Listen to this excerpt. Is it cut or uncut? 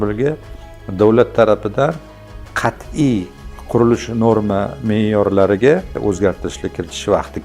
uncut